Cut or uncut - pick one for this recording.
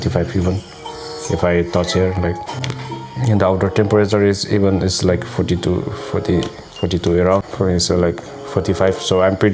uncut